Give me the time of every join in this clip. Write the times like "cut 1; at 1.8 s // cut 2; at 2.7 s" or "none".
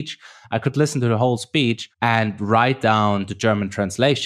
cut 1; at 1.9 s